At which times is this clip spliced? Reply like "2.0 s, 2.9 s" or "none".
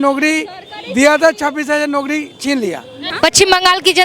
3.0 s

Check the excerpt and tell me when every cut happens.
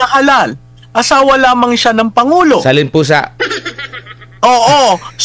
none

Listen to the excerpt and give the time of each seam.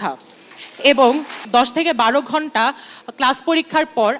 1.4 s

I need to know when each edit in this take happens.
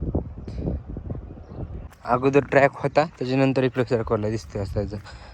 1.8 s

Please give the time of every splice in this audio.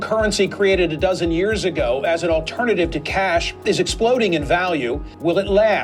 none

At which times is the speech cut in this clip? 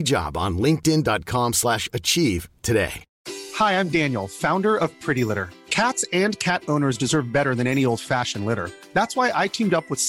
3.1 s

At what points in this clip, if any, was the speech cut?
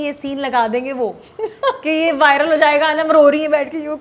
none

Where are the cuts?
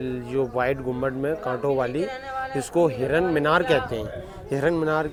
none

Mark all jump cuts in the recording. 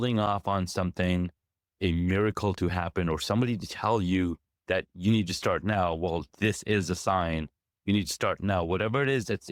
none

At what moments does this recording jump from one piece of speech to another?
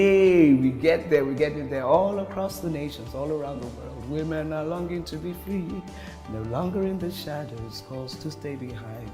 none

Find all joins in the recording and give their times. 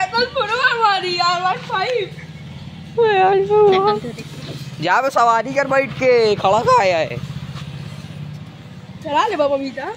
none

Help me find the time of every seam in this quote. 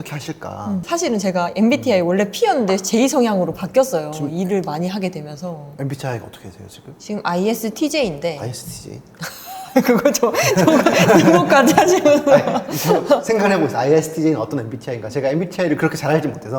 none

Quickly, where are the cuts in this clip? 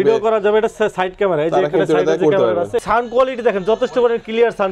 2.8 s

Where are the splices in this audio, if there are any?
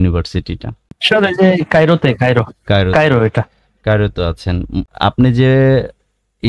1.0 s, 4.9 s

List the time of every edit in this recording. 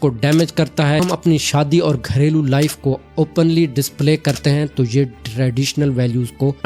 1.0 s

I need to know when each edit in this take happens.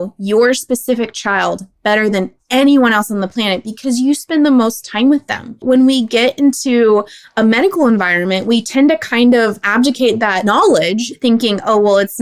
5.6 s, 10.5 s

